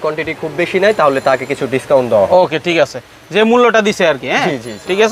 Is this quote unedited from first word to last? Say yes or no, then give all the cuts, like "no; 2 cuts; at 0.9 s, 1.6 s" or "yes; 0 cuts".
yes; 0 cuts